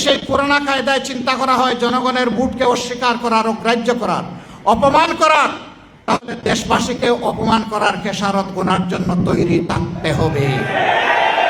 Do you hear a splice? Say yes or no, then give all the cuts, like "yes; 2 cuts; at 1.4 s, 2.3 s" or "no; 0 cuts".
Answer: no; 0 cuts